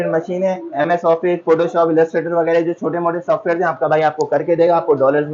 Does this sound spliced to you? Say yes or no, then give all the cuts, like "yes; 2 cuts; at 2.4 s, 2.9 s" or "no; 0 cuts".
no; 0 cuts